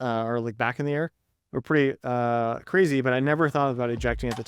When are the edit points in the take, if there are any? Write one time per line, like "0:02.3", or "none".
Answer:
none